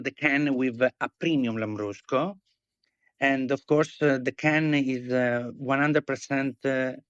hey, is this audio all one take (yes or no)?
yes